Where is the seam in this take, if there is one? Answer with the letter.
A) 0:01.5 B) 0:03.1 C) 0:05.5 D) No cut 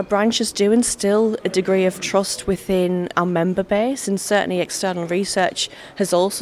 B